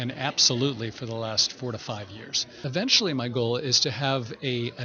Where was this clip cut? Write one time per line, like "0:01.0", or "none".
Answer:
0:02.6

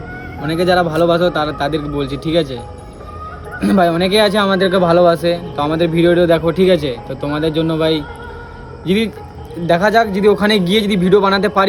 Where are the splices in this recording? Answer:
none

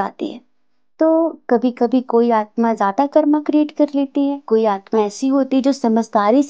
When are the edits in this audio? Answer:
0:04.4

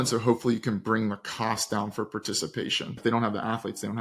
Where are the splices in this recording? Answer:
0:03.0

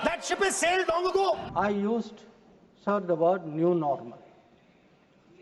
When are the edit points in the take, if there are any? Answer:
none

